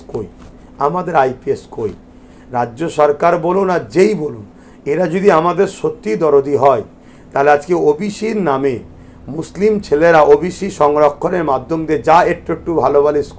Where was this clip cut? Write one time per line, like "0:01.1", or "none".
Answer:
none